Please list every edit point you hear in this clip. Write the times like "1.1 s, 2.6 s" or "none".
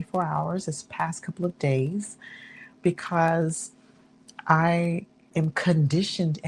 5.3 s